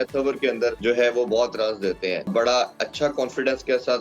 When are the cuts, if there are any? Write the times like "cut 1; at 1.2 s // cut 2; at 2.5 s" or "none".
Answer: cut 1; at 0.8 s // cut 2; at 2.3 s